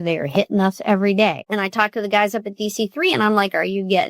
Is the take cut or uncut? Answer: cut